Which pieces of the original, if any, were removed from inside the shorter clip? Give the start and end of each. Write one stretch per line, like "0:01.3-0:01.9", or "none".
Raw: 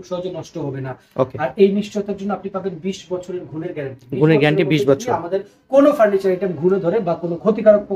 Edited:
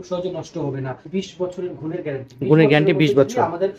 0:01.1-0:02.8

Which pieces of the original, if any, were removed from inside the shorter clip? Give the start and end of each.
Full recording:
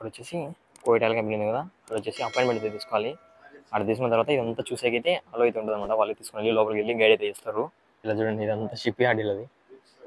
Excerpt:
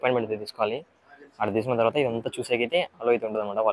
none

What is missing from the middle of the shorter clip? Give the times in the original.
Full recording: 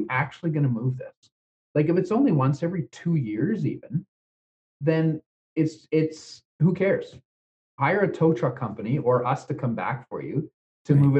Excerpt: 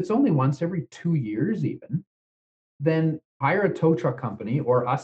0:05.3-0:07.6

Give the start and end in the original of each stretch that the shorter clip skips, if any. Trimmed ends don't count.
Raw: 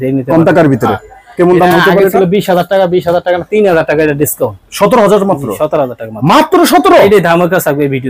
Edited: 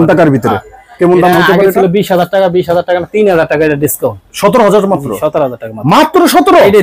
none

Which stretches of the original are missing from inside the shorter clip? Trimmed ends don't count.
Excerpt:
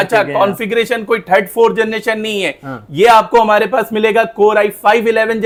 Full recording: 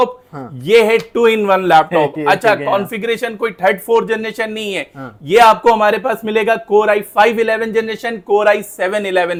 none

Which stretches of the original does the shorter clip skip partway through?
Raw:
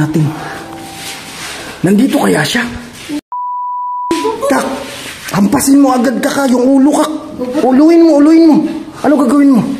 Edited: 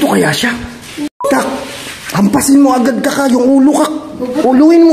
0:03.3-0:04.4

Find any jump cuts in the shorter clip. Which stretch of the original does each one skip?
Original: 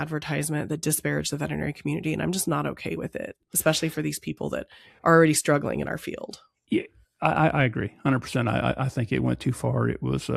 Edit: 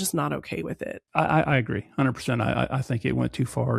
0:03.3-0:07.1

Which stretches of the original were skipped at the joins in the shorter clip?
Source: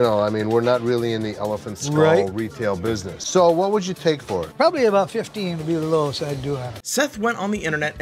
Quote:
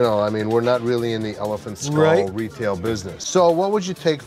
none

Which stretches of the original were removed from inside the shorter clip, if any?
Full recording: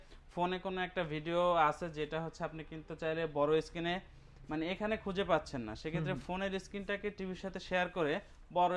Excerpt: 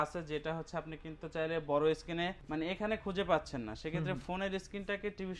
0:04.1-0:04.4

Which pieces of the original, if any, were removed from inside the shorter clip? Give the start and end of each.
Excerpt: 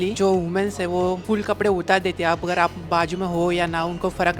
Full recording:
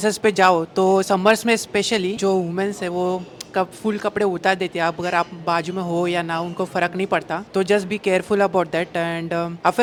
0:03.2-0:03.8

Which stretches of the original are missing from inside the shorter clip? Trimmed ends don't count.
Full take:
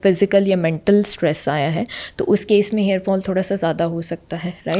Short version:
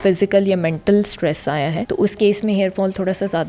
0:01.8-0:02.1

